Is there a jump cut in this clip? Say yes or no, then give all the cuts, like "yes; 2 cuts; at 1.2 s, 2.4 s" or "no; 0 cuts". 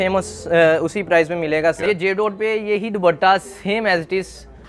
yes; 1 cut; at 1.8 s